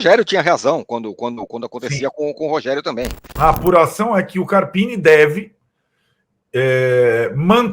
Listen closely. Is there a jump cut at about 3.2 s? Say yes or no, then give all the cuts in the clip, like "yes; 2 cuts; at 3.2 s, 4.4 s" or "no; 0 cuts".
yes; 1 cut; at 3.2 s